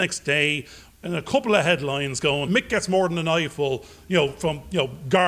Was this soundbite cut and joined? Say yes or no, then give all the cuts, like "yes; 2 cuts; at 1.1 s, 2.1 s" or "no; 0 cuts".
yes; 1 cut; at 2.5 s